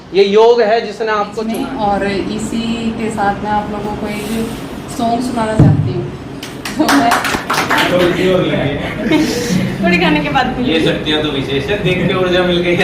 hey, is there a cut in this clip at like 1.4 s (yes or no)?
yes